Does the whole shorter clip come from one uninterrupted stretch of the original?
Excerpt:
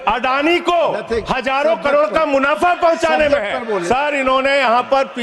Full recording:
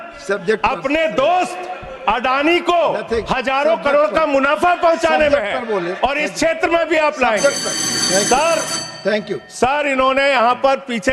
no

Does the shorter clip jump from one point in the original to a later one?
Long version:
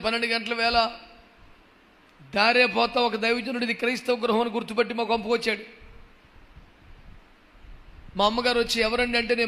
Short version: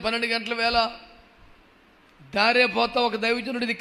no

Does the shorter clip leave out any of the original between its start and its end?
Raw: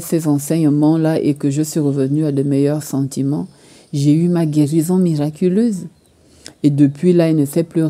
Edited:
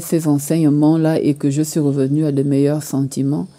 no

